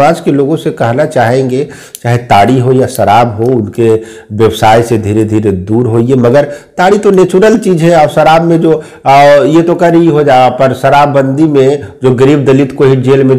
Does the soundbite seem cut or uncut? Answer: uncut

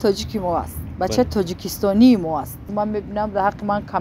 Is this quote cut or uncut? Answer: cut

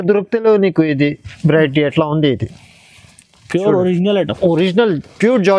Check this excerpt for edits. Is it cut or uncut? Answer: uncut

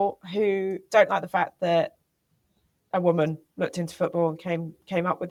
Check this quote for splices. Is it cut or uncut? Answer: uncut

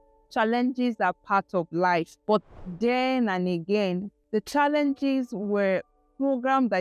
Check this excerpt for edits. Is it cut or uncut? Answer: cut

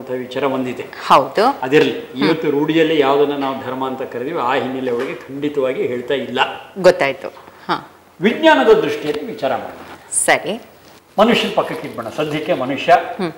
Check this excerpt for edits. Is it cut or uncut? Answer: uncut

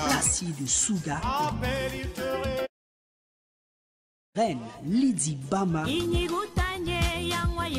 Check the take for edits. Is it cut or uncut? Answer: uncut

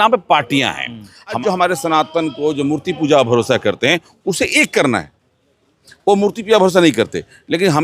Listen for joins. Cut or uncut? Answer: cut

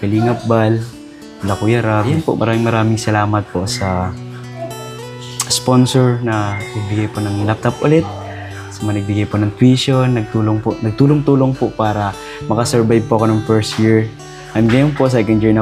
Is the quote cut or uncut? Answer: cut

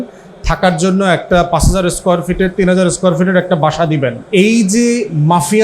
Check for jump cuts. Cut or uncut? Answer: cut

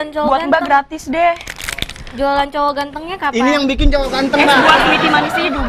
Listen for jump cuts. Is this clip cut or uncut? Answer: uncut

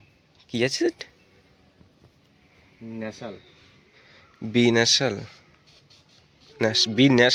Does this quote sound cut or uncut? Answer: uncut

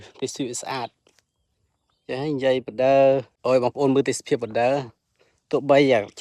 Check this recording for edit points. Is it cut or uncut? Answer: cut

